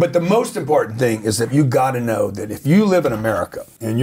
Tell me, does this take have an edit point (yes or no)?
yes